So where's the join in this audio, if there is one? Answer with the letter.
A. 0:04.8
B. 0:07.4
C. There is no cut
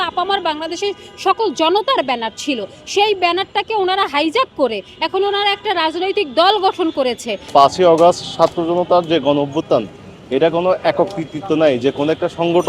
B